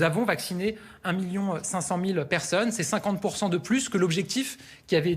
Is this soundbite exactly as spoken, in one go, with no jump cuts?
yes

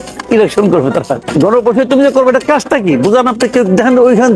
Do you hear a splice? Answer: yes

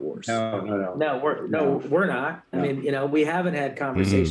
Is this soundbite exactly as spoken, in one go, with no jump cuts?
no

